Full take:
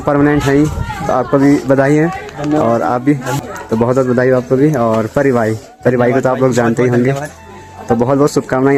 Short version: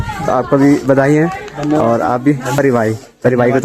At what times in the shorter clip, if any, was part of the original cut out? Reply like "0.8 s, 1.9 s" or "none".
2.6 s